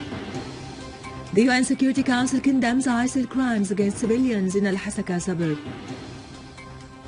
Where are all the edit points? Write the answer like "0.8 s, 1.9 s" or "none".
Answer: 4.7 s